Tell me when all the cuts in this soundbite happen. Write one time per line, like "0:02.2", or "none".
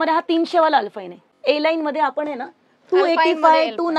0:01.3